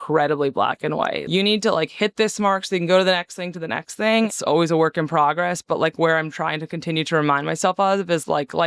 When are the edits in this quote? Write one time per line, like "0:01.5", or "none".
0:01.2
0:04.3

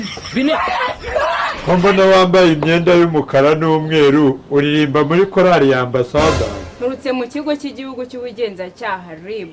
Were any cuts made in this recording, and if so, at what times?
0:01.6

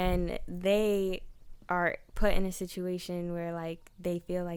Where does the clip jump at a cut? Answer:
none

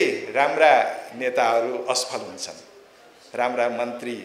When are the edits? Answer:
none

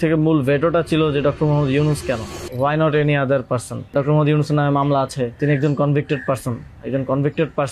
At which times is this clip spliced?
0:02.4
0:03.9
0:05.4

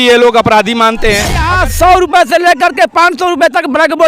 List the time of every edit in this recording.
0:01.5

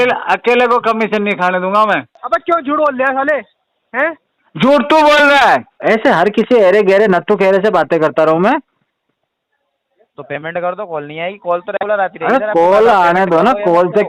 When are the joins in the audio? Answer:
0:02.1
0:05.7

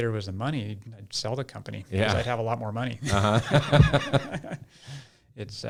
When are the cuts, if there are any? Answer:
none

